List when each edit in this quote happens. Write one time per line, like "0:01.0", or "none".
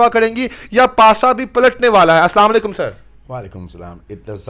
none